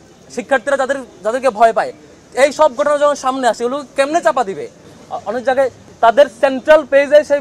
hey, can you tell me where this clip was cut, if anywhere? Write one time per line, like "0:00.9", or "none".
0:04.9